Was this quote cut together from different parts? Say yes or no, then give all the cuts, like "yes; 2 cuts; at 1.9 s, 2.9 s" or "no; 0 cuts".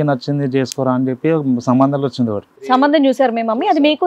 yes; 1 cut; at 2.5 s